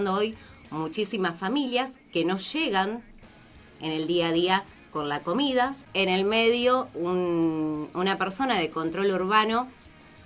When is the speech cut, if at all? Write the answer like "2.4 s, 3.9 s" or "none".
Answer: 5.8 s